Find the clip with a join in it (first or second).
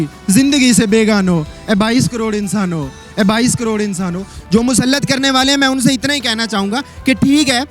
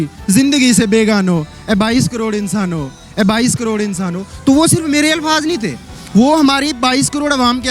first